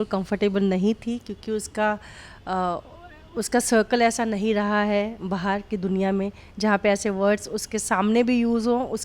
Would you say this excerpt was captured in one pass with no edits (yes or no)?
yes